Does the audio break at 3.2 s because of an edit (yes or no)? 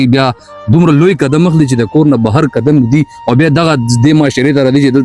no